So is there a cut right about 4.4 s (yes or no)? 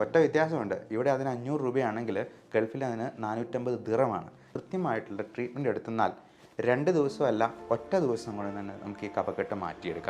yes